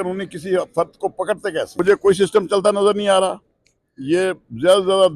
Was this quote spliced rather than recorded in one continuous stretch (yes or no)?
yes